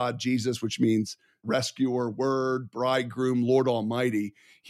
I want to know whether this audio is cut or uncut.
cut